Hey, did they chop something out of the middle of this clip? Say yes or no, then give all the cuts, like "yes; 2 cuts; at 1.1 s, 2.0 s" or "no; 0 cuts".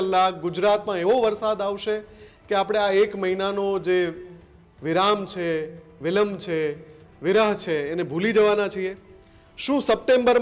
no; 0 cuts